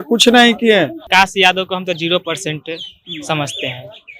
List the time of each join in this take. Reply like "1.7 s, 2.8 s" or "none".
1.0 s